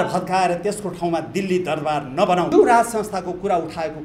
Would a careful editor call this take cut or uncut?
cut